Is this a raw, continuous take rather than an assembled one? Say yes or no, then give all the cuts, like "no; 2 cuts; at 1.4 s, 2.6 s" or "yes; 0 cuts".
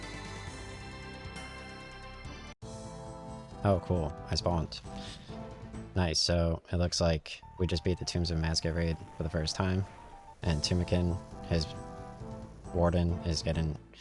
yes; 0 cuts